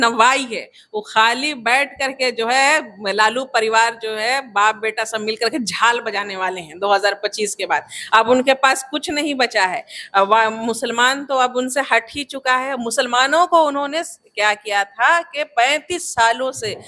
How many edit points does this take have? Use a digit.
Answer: 0